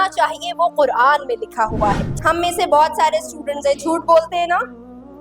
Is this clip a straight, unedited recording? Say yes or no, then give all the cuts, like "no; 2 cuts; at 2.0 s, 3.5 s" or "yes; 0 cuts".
no; 1 cut; at 2.1 s